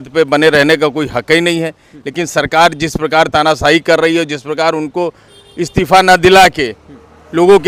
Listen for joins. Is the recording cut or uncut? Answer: uncut